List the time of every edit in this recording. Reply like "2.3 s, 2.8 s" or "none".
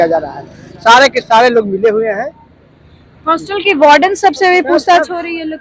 none